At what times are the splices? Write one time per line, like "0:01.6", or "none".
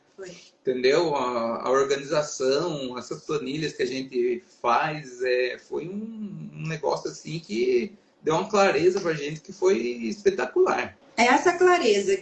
0:11.0